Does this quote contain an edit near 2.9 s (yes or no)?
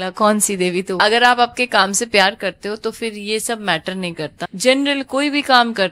no